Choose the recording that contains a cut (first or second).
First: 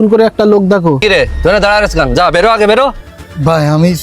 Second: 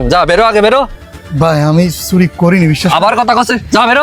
first